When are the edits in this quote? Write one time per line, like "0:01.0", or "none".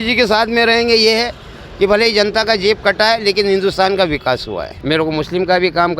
0:04.7